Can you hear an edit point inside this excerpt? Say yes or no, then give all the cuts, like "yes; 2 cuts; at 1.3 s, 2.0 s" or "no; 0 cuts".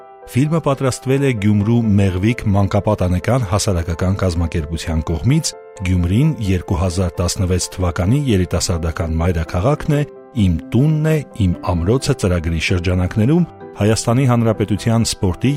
no; 0 cuts